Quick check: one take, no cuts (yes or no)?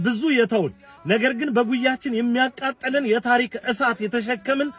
yes